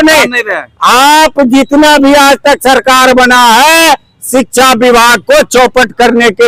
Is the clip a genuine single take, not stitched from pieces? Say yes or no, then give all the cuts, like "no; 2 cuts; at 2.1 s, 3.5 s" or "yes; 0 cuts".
yes; 0 cuts